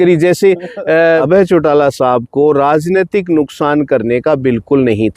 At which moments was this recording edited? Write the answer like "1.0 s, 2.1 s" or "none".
1.2 s